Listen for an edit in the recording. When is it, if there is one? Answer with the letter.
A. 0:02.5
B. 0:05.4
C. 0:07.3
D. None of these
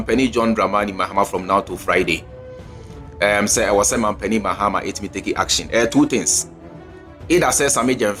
D